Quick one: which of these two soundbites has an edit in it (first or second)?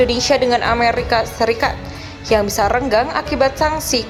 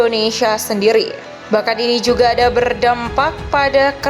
second